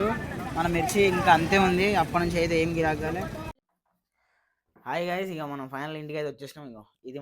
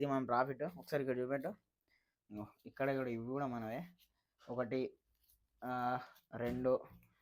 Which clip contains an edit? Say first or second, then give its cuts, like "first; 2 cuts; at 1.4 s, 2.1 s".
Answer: first; 1 cut; at 3.5 s